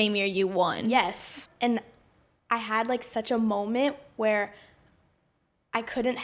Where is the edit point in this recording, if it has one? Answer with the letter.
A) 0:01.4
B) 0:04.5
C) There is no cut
A